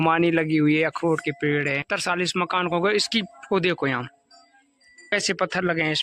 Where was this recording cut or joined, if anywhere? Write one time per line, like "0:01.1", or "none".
0:01.8
0:05.1